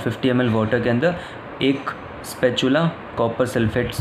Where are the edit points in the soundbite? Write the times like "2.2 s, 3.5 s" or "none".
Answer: none